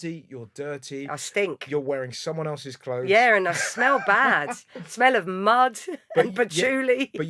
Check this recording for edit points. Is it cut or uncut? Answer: uncut